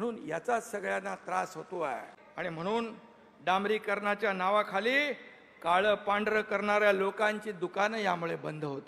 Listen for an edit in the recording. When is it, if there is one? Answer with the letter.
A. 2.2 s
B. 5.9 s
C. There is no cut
A